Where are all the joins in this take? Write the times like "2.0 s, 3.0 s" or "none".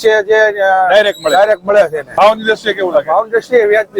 2.0 s